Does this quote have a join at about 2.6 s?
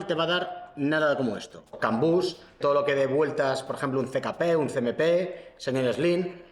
yes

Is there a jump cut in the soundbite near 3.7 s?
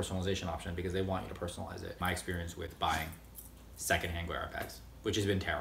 yes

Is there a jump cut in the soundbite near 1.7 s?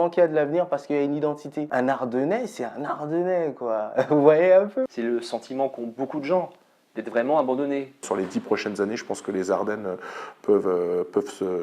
yes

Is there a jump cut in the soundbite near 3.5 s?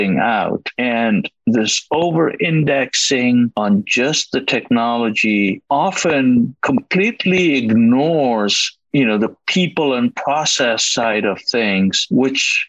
yes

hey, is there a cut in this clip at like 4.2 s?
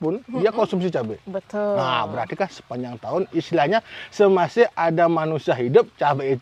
no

